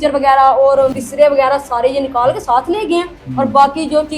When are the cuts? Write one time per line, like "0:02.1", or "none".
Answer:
0:00.9